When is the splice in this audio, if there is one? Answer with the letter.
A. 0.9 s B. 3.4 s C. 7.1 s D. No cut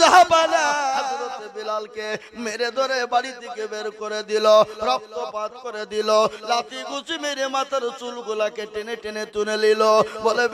A